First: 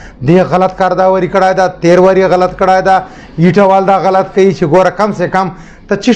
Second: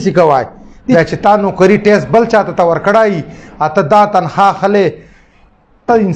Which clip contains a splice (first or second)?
second